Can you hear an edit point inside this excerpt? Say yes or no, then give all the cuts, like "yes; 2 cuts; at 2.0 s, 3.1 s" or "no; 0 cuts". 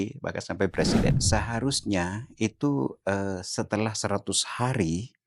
yes; 1 cut; at 1.2 s